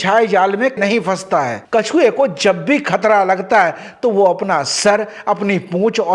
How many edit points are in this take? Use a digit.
1